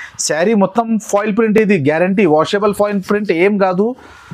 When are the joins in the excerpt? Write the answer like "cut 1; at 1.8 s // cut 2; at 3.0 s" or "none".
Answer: none

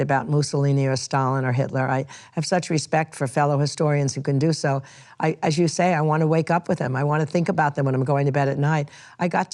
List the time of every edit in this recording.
none

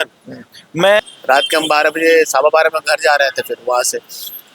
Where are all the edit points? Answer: cut 1; at 1.0 s

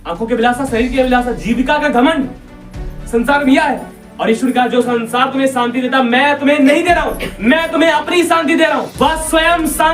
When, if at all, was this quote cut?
cut 1; at 7.2 s // cut 2; at 8.9 s

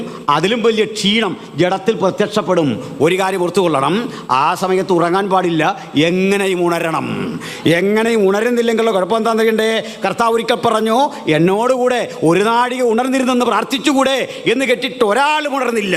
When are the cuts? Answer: none

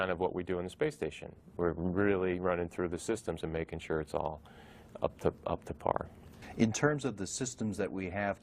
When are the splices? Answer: cut 1; at 4.0 s

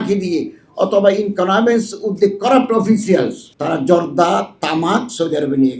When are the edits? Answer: cut 1; at 3.5 s

